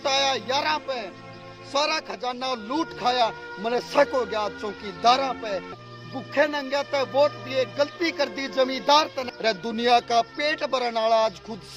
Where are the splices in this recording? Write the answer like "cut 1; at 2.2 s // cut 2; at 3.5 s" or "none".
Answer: cut 1; at 5.8 s // cut 2; at 9.2 s